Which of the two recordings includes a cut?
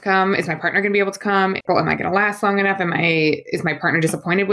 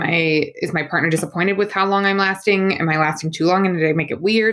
first; 1 cut; at 1.6 s

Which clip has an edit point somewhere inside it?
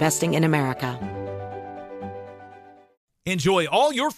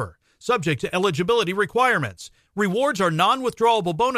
first; 1 cut; at 1.0 s

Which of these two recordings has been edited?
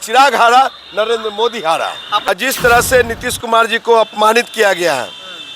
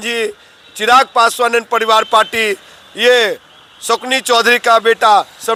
first; 1 cut; at 2.3 s

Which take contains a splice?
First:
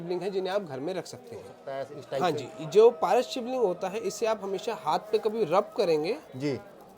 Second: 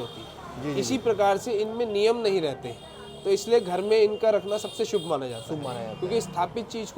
first; 1 cut; at 1.6 s

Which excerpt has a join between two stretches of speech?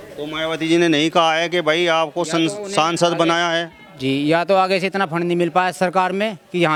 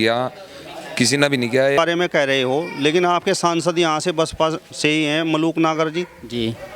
second; 1 cut; at 1.8 s

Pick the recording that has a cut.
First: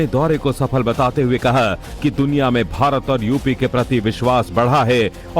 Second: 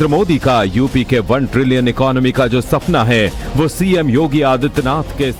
first; 1 cut; at 4.4 s

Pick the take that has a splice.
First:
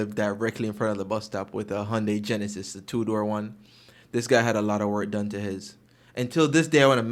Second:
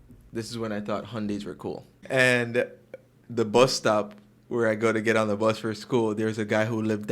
second; 1 cut; at 2.0 s

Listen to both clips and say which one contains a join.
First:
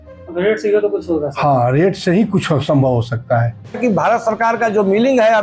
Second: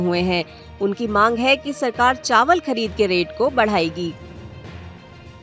second; 1 cut; at 4.2 s

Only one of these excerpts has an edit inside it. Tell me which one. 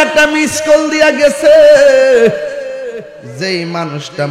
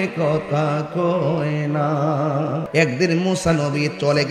second; 1 cut; at 2.6 s

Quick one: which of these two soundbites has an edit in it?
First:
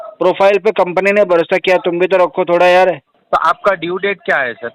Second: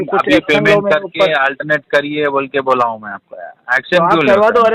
first; 1 cut; at 3.2 s

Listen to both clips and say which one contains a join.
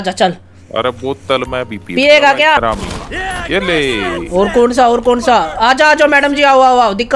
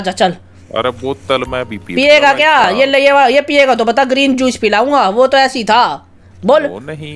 first; 1 cut; at 2.6 s

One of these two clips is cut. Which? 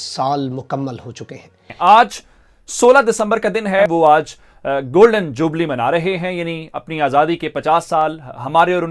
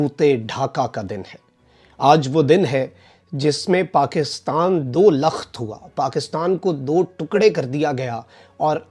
first; 2 cuts; at 1.5 s, 3.9 s

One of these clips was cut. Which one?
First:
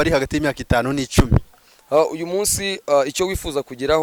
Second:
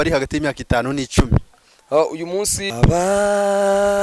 second; 1 cut; at 2.7 s

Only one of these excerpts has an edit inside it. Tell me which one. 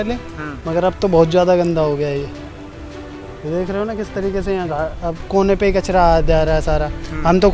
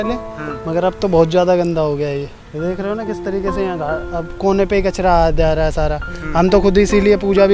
second; 1 cut; at 2.4 s

